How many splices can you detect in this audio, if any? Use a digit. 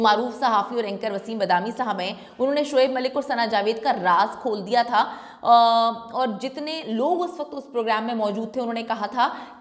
0